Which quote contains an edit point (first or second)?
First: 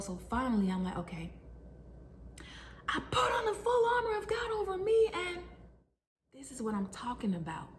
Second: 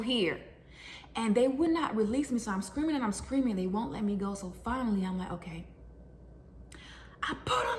first